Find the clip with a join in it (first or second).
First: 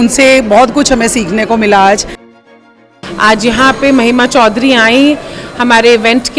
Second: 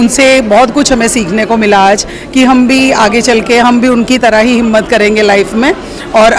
first